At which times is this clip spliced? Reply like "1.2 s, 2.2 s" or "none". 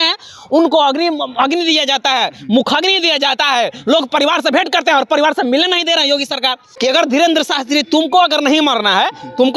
6.6 s